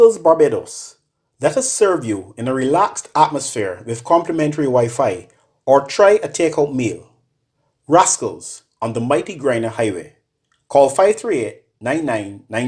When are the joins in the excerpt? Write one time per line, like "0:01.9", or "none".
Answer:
none